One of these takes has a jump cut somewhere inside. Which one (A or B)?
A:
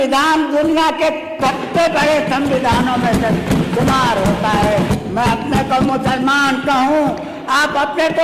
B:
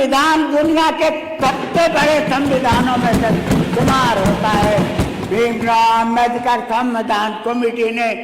A